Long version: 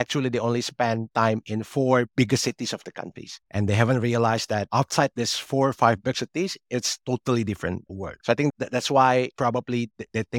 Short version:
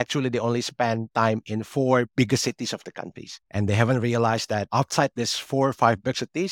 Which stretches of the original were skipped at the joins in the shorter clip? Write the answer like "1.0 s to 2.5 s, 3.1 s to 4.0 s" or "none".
none

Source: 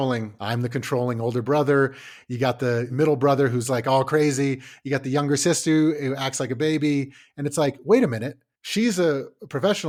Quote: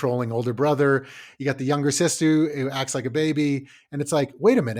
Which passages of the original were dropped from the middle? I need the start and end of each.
2.1 s to 4.7 s

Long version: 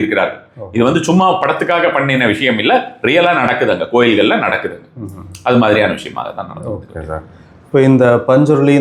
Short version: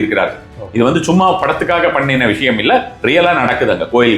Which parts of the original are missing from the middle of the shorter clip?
none

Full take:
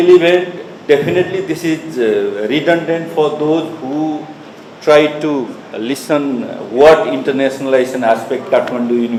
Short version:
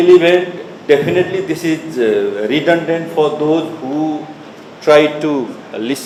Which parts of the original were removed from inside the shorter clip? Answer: none

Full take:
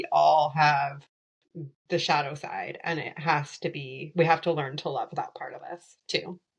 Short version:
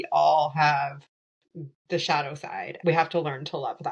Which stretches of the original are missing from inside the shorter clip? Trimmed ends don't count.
2.7 s to 4.0 s

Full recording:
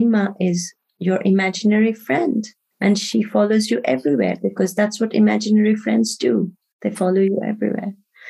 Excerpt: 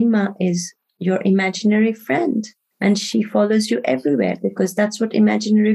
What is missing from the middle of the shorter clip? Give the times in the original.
none

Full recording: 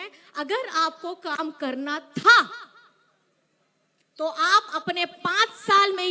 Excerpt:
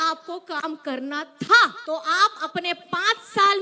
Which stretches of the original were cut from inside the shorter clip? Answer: 2.5 s to 4.1 s

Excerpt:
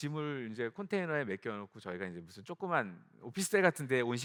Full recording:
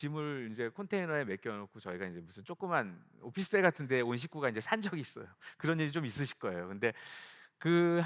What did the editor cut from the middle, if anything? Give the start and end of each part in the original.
none

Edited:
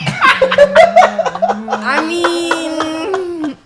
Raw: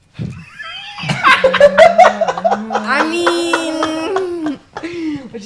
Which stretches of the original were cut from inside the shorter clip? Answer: none

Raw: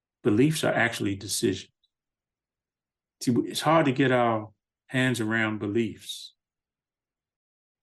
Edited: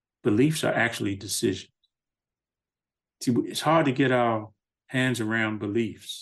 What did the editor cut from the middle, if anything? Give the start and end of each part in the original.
none

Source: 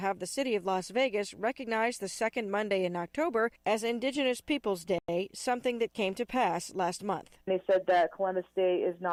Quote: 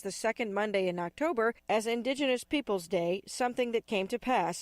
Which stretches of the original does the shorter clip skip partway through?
5.0 s to 5.1 s

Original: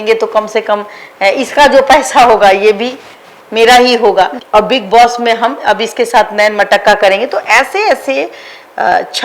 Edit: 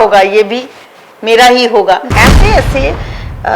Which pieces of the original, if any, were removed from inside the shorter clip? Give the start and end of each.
4.4 s to 7.4 s

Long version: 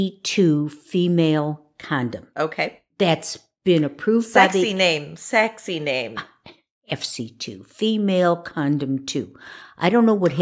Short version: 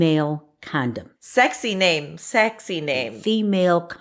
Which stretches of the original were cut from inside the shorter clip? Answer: 2.4 s to 4.2 s, 6.1 s to 7.7 s

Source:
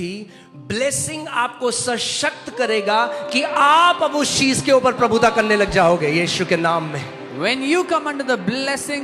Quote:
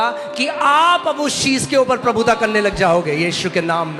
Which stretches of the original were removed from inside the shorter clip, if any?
none

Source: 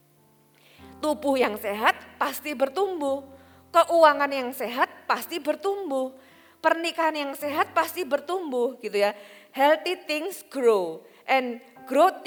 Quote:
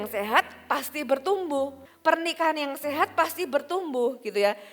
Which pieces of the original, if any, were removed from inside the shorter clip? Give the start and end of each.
3.4 s to 6.4 s

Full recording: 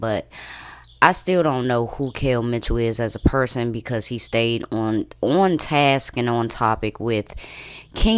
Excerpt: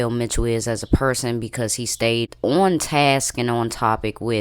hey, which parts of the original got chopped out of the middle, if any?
4.6 s to 5.1 s

